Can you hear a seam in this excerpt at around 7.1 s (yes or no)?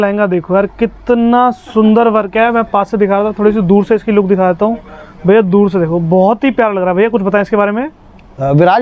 no